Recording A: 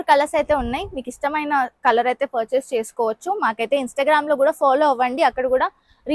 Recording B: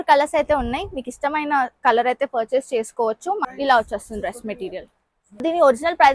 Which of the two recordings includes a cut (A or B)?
B